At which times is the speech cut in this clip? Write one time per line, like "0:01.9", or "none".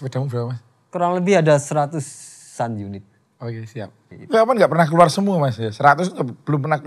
0:04.1